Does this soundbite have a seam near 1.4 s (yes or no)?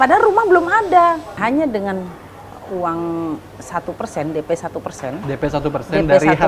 yes